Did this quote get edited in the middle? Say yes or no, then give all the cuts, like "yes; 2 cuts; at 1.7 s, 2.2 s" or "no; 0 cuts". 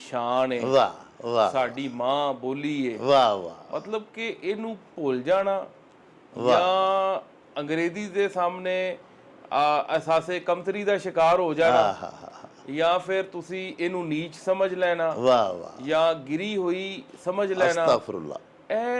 no; 0 cuts